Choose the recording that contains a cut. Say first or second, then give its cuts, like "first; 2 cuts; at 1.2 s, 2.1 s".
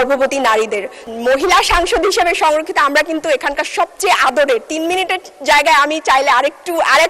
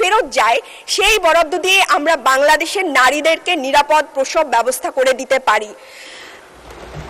first; 1 cut; at 0.9 s